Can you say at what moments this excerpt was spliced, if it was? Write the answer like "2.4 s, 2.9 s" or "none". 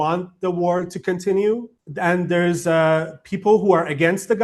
1.8 s